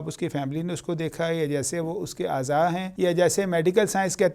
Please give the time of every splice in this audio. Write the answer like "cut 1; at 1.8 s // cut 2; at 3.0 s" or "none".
cut 1; at 2.9 s